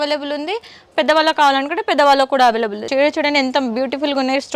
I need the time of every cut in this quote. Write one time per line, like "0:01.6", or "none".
0:02.9

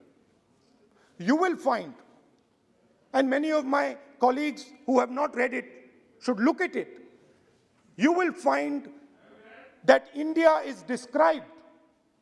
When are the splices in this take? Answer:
none

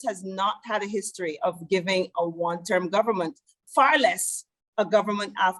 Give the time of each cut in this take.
none

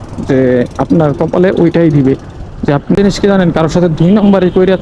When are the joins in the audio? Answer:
0:03.0

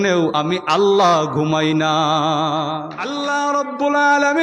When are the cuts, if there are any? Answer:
0:02.9

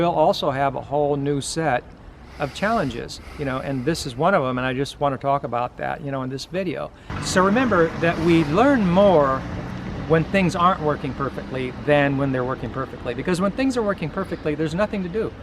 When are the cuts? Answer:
0:07.0

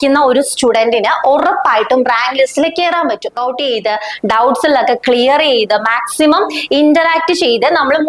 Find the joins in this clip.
0:03.3

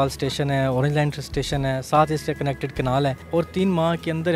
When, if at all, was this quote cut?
0:03.2

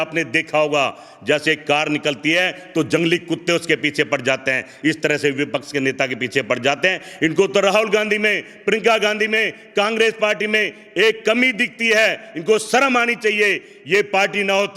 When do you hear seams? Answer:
none

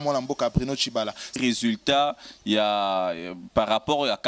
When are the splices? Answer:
0:01.4

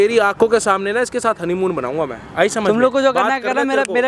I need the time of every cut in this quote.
none

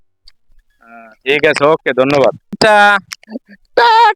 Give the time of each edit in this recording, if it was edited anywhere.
0:02.6

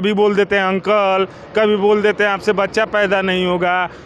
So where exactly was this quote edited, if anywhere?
none

